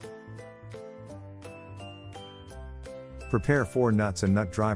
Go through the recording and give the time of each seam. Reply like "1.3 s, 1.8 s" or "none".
none